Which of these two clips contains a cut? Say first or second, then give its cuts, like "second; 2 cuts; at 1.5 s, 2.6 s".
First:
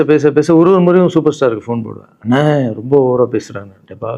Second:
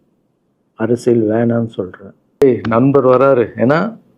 second; 1 cut; at 2.4 s